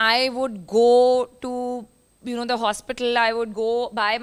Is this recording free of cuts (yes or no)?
yes